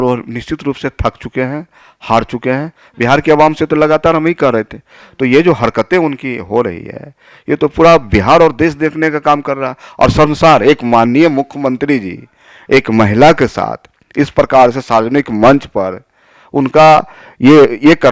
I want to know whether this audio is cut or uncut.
uncut